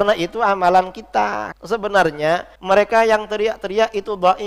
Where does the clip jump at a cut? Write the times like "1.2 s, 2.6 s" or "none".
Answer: 1.5 s, 2.5 s